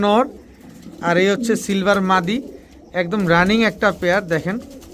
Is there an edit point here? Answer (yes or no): no